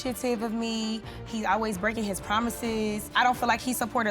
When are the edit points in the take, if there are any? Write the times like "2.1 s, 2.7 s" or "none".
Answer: 3.1 s

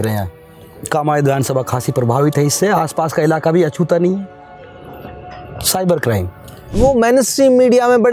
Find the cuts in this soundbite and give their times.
6.7 s

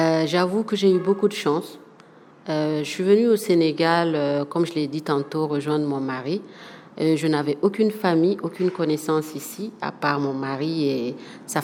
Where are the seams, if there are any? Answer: none

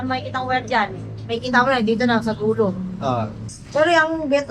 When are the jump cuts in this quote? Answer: none

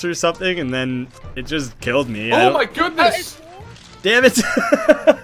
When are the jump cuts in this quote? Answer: 3.8 s

